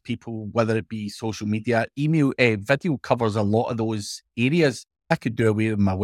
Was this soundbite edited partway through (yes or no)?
yes